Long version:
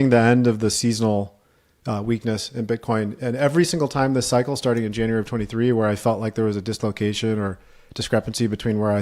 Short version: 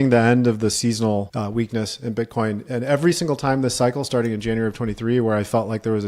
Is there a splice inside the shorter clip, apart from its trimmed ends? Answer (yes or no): yes